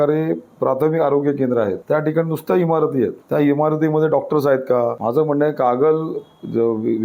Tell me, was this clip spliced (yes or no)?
yes